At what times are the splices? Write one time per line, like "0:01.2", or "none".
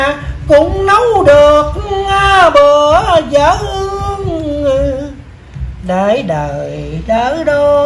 none